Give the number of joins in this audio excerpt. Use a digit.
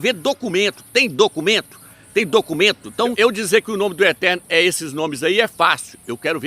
1